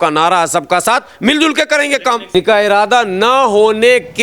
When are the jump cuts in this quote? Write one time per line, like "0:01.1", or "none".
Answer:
0:02.3